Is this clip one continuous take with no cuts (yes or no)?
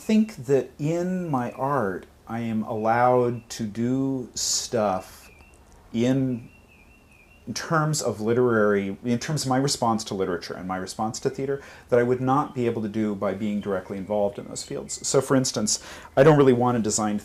yes